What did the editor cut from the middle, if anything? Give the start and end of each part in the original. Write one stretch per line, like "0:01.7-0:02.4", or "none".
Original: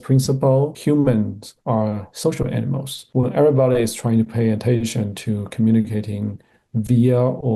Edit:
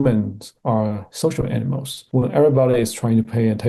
none